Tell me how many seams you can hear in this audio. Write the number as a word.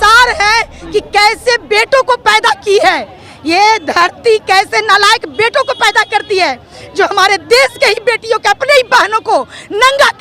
zero